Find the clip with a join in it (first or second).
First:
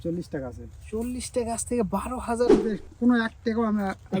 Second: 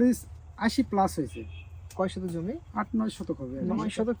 first